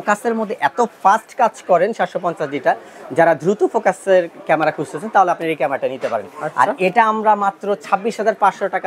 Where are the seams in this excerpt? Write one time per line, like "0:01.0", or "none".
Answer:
none